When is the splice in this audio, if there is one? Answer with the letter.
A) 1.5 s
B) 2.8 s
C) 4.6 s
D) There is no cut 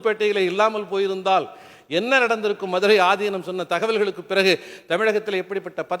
D